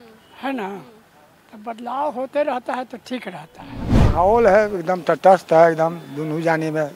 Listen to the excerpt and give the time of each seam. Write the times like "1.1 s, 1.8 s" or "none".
3.9 s